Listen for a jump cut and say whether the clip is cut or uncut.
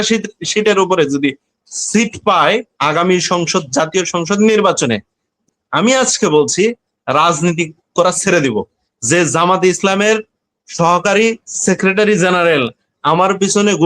cut